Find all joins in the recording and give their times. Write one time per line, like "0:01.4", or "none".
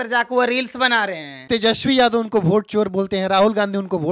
0:01.3